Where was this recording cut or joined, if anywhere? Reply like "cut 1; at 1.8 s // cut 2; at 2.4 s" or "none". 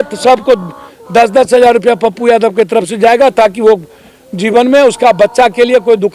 none

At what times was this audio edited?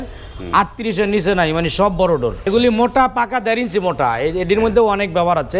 cut 1; at 2.5 s

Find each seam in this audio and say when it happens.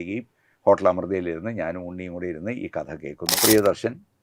cut 1; at 3.2 s

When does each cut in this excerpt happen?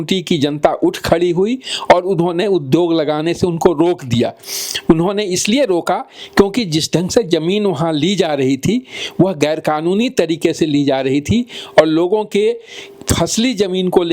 none

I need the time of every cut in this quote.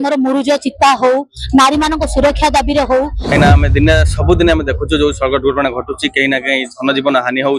cut 1; at 3.3 s

